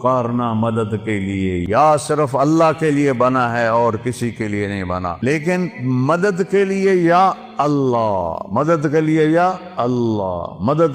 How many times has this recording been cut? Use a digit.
2